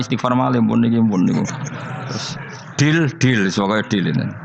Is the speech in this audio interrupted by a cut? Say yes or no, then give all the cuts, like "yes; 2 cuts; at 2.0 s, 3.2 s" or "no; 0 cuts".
no; 0 cuts